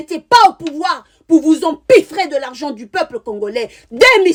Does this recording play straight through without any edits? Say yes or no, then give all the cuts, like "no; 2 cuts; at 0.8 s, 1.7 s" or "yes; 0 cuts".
yes; 0 cuts